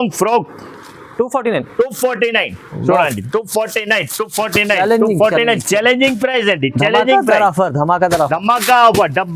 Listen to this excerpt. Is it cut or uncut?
uncut